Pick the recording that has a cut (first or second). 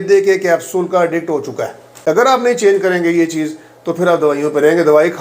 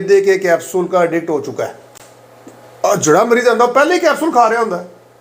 first